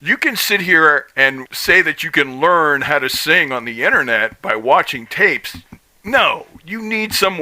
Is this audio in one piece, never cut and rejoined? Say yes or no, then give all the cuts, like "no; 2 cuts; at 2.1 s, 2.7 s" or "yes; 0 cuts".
no; 1 cut; at 1.5 s